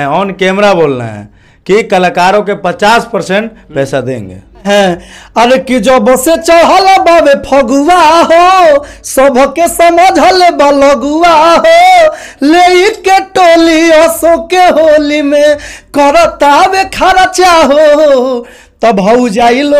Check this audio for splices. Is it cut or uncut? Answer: cut